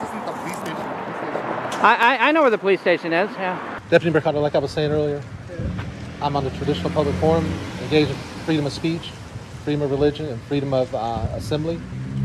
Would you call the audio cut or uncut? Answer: cut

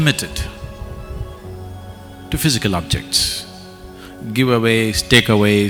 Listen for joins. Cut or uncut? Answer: uncut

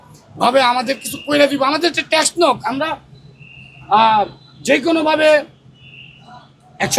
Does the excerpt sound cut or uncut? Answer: uncut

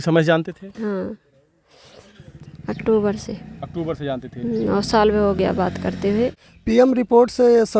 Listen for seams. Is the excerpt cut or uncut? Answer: cut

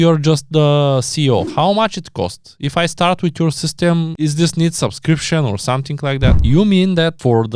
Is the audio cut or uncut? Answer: cut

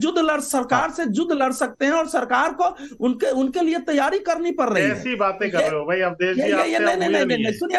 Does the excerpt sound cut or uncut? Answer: uncut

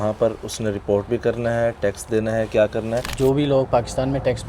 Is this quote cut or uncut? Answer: cut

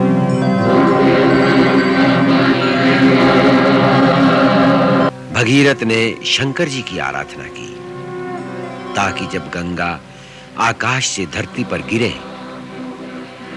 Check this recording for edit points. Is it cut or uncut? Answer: cut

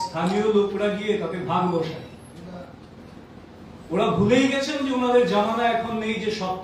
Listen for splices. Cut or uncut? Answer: uncut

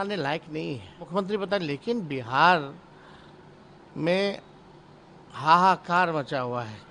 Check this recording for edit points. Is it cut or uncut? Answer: cut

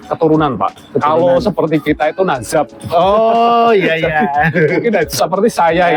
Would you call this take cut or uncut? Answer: uncut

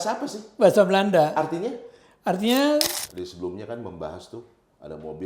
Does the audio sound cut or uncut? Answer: cut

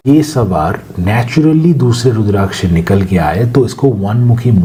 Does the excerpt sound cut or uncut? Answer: uncut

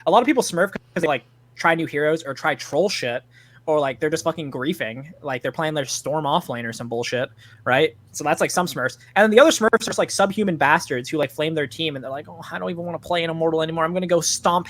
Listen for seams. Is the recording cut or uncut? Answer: uncut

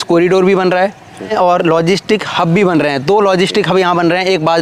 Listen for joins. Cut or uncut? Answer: cut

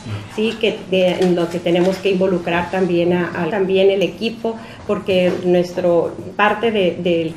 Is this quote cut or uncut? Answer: uncut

